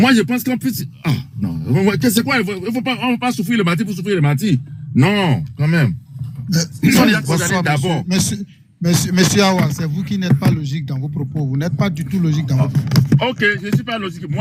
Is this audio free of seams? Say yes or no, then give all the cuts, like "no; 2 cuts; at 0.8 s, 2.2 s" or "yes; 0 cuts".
yes; 0 cuts